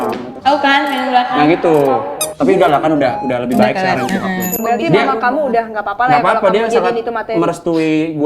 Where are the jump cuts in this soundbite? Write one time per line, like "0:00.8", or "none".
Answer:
0:04.6